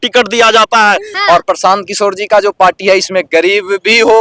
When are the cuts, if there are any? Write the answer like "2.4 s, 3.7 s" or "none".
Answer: 1.1 s